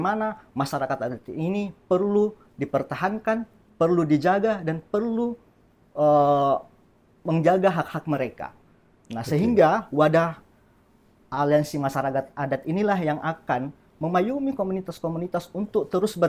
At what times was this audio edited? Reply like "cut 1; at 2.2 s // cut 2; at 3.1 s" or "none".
none